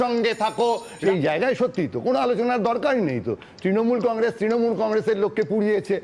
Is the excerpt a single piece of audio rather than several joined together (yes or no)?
no